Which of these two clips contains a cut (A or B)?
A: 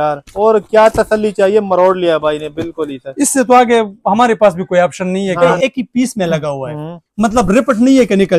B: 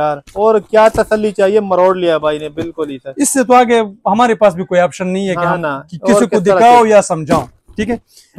A